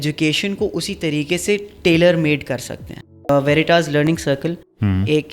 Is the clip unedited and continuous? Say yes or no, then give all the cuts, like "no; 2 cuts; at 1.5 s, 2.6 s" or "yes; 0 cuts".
no; 1 cut; at 3.3 s